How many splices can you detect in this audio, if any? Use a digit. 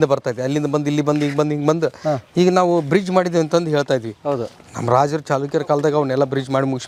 0